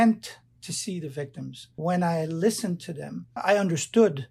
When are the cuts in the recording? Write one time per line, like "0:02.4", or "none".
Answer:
0:01.6
0:03.4